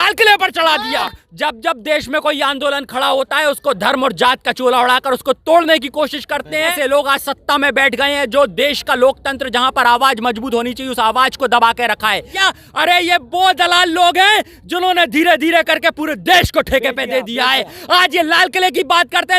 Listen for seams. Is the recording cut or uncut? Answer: cut